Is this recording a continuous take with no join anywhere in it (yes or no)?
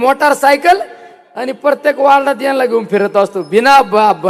yes